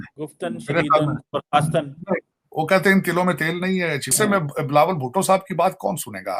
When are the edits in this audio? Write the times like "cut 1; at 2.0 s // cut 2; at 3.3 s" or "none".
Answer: cut 1; at 4.1 s